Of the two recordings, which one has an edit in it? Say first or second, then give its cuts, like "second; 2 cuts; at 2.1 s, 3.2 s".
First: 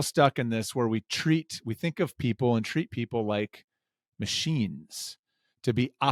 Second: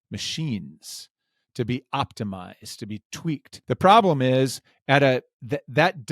second; 1 cut; at 3.5 s